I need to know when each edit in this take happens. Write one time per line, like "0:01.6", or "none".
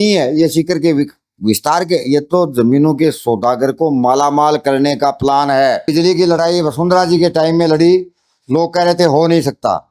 0:05.9